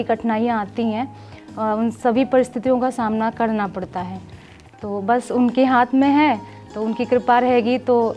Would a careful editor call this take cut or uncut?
uncut